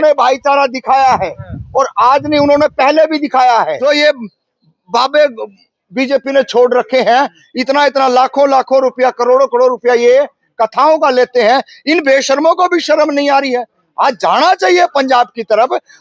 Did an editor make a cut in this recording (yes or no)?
yes